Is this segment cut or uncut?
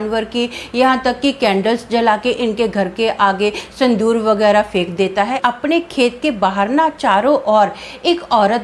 cut